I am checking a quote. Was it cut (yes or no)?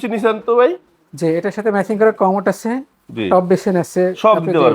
no